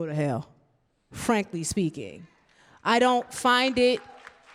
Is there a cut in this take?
no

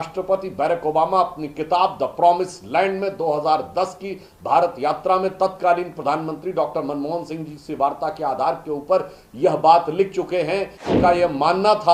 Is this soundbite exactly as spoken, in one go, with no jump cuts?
no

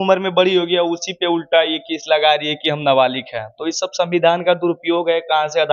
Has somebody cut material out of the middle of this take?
no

